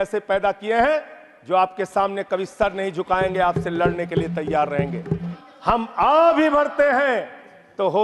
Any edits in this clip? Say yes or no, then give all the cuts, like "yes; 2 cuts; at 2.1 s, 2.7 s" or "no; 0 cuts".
yes; 1 cut; at 5.4 s